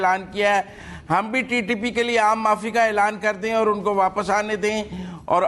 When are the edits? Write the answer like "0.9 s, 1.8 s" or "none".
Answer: none